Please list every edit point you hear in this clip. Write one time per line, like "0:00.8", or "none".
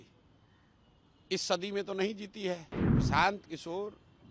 0:02.8

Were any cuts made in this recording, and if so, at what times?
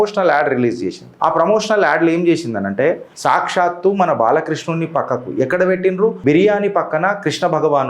0:03.1
0:06.2

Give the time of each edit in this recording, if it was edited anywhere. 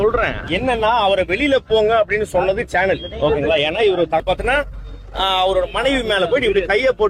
0:04.2

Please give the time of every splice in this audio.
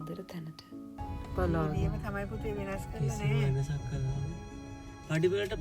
0:01.0

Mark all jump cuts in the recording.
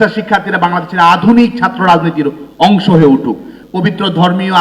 0:03.6

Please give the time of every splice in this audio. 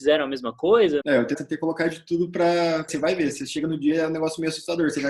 0:01.4
0:02.9

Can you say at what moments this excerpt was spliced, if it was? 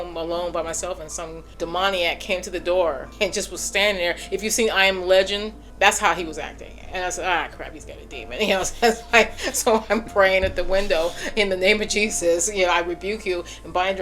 0:01.4
0:03.1
0:05.6

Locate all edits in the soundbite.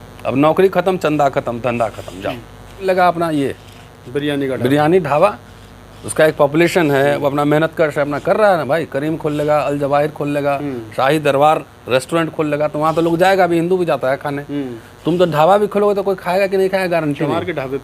0:02.8

